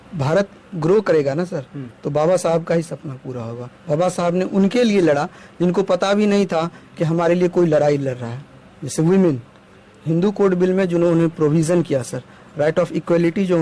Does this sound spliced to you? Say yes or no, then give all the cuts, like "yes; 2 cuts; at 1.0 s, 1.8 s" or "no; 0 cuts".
no; 0 cuts